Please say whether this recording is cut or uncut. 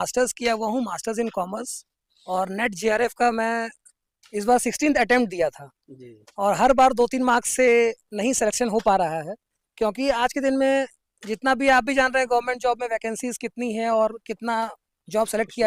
uncut